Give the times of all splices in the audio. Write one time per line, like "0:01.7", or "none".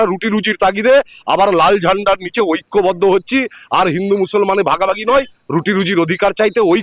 none

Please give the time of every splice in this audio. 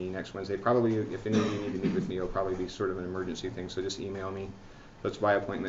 0:04.5

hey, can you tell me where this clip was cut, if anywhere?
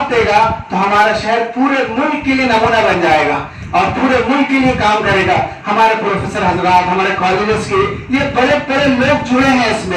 none

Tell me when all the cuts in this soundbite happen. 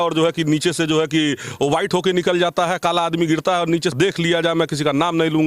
0:03.9

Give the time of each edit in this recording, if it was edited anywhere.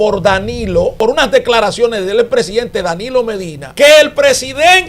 0:00.9
0:03.6

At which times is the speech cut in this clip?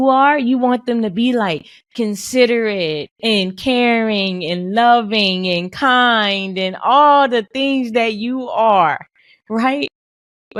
none

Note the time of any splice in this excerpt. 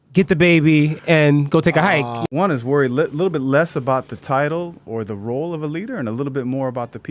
0:02.1

